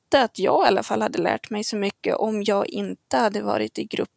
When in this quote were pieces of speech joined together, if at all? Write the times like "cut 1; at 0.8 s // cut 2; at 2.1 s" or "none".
none